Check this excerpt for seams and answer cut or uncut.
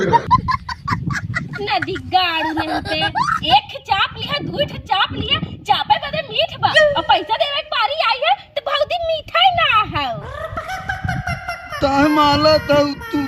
uncut